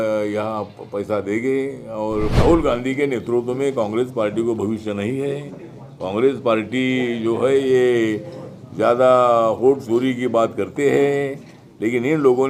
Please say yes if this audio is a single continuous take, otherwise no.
no